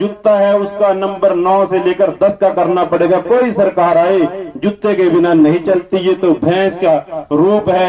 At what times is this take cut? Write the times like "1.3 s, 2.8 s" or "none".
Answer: none